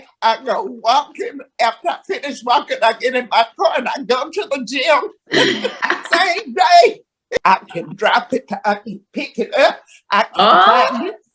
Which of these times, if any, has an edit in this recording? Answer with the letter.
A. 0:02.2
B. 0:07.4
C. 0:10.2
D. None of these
B